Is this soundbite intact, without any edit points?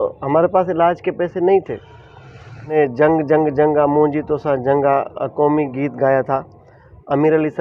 no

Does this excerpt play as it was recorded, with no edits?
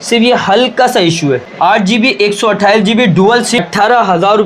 no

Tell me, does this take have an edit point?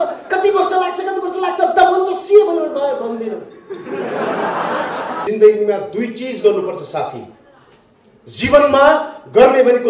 yes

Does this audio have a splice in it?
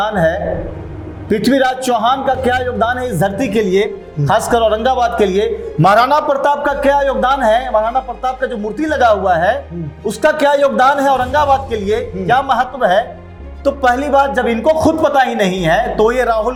no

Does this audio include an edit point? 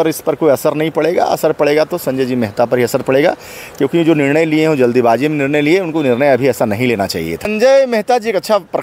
yes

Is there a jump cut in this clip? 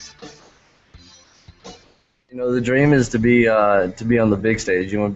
yes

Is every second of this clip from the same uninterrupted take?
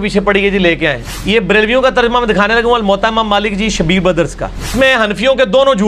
no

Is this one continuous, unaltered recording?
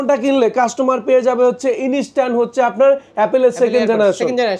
yes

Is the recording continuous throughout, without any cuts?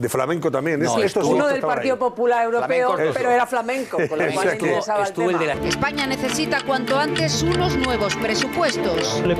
yes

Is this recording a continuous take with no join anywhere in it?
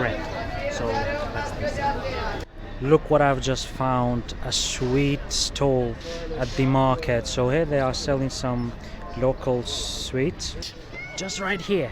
no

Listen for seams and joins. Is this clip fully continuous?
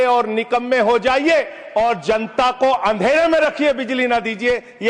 yes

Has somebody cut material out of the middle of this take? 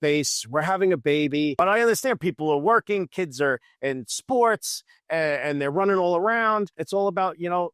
yes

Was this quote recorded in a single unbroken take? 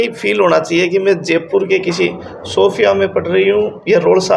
yes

